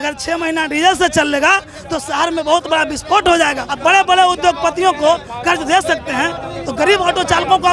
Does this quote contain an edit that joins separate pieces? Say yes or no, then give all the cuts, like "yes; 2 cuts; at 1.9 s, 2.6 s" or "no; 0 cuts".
yes; 1 cut; at 3.7 s